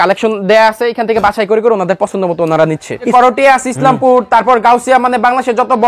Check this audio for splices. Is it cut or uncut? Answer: cut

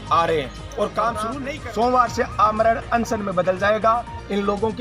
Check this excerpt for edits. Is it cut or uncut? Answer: cut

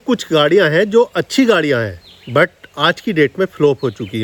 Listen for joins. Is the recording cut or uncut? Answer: uncut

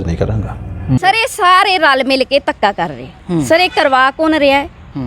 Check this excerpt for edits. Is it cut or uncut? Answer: cut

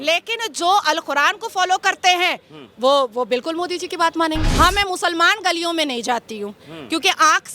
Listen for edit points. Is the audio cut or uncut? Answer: cut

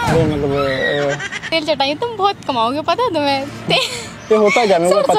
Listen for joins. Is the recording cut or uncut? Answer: cut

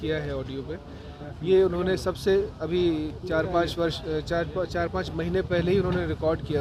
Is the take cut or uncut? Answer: uncut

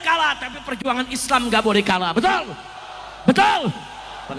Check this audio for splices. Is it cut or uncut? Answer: uncut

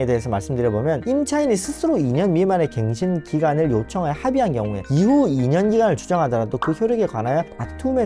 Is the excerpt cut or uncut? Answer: uncut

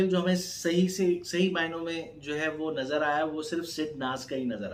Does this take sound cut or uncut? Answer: uncut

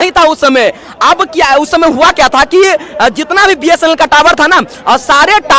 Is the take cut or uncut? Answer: uncut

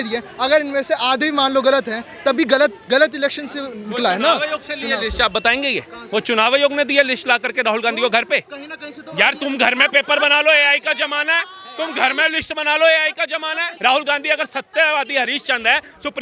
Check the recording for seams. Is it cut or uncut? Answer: cut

